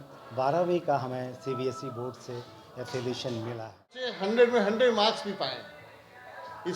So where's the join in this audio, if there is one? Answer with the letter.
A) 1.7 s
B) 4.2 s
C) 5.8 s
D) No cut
B